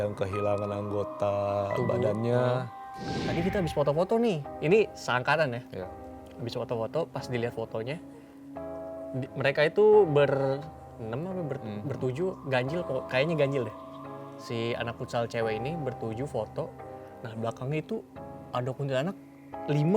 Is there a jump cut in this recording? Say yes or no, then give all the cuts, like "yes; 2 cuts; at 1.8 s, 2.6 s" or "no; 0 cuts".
yes; 1 cut; at 3.2 s